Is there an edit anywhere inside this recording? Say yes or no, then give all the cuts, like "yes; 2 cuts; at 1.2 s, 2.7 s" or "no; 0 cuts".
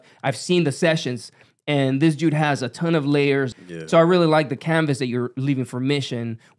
yes; 1 cut; at 3.5 s